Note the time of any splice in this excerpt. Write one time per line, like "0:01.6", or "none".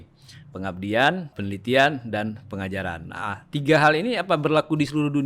0:01.3